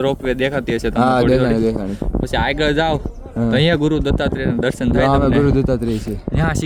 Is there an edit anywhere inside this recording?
no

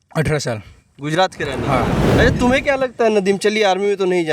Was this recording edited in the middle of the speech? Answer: yes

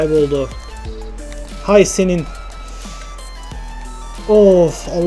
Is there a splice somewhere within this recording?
no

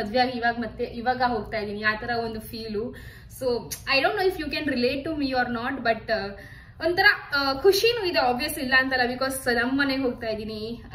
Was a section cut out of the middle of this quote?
no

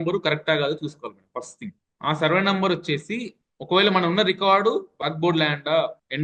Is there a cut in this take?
no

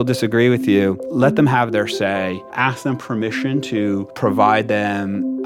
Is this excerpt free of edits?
no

